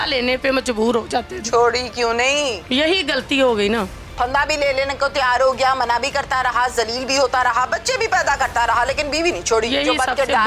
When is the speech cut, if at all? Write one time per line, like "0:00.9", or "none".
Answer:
none